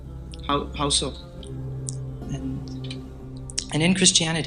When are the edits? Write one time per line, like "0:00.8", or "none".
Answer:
0:01.4